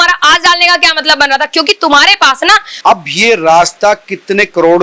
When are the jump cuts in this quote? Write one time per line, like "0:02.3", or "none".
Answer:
0:02.7